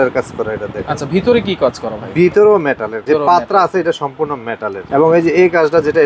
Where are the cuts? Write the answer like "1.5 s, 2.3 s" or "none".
2.9 s, 4.8 s

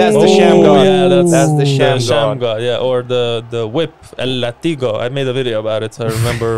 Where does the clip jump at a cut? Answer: none

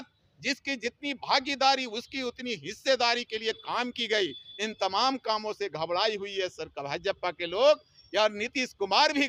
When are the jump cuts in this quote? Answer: none

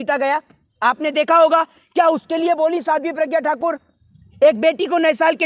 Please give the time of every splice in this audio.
none

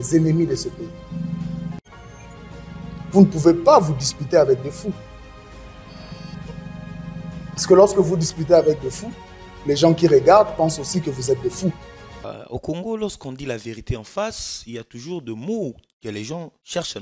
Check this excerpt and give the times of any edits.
12.2 s

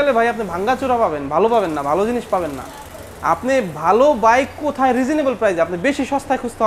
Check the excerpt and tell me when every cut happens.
none

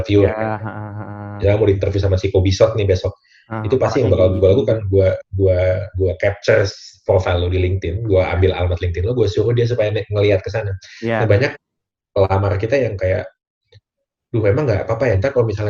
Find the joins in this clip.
none

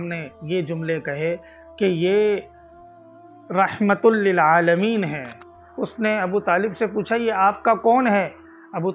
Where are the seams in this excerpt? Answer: 5.6 s

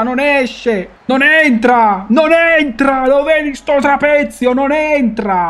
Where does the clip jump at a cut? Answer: 0.9 s

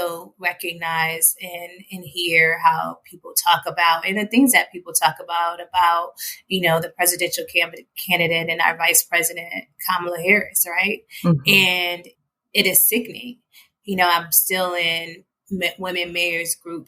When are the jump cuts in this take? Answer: none

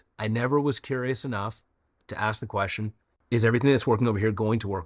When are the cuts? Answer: 3.1 s

